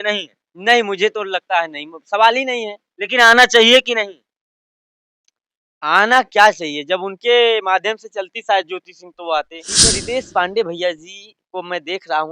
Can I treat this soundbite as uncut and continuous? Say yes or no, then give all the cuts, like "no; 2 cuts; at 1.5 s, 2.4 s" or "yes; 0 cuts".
no; 1 cut; at 9.6 s